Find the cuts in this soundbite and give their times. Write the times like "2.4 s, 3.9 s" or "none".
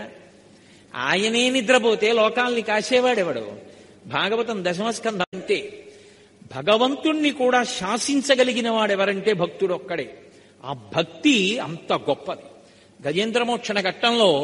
5.3 s